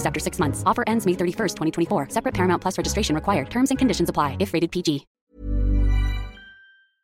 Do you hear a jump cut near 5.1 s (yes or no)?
no